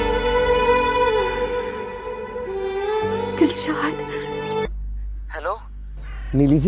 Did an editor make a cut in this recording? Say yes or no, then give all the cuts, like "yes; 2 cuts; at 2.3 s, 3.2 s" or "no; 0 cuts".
yes; 1 cut; at 2.7 s